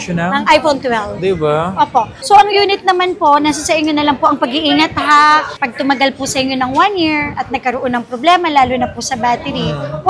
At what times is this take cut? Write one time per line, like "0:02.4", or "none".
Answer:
0:02.1

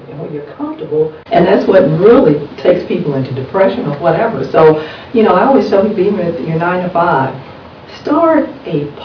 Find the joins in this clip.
0:01.2

